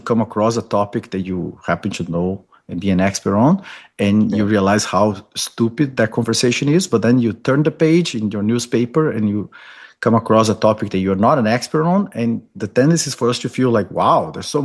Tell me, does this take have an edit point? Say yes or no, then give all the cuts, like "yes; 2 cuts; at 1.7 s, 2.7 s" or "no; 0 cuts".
no; 0 cuts